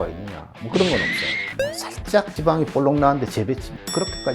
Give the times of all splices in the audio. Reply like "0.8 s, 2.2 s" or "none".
1.6 s

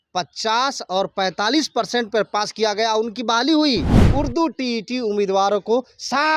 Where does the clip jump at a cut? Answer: 4.0 s

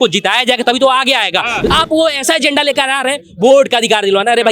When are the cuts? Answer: 1.7 s

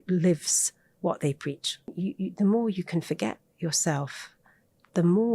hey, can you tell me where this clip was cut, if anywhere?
1.9 s

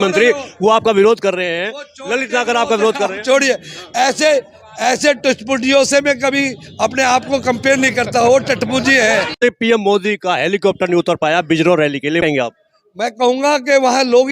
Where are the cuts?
9.4 s, 12.2 s

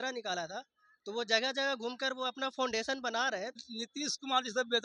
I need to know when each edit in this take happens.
3.7 s

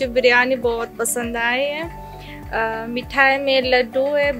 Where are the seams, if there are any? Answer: none

